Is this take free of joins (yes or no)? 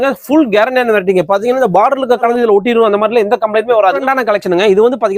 no